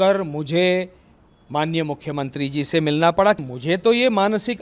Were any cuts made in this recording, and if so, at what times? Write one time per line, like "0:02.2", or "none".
0:03.4